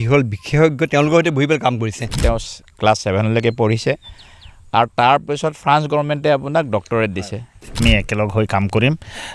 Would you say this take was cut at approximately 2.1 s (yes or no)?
yes